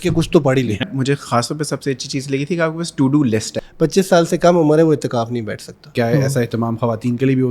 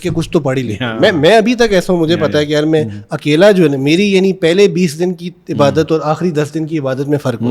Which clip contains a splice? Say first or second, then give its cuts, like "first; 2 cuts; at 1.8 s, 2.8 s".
first; 3 cuts; at 0.9 s, 3.6 s, 5.9 s